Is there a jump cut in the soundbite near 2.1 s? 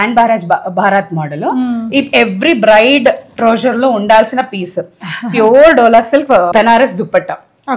no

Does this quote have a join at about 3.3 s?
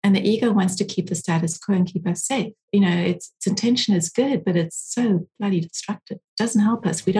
no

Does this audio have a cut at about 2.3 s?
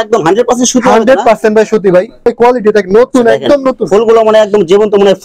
yes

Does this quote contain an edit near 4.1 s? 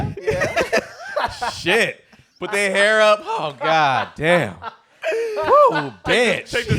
no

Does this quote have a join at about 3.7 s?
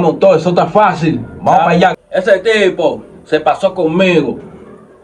no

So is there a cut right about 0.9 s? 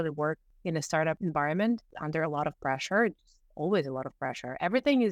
yes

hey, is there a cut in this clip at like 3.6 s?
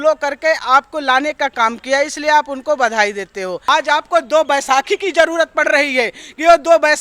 yes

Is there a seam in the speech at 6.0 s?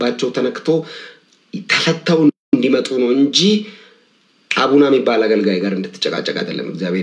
no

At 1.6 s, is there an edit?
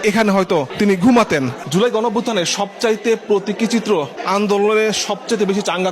yes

